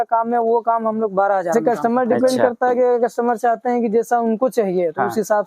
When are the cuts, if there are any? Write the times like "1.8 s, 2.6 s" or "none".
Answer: 1.5 s